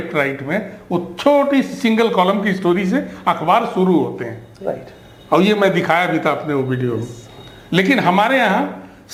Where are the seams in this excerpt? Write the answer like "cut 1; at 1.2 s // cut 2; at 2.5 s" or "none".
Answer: none